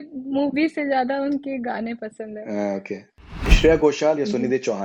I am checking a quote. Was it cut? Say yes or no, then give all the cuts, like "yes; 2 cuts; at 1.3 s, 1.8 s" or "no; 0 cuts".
yes; 1 cut; at 3.5 s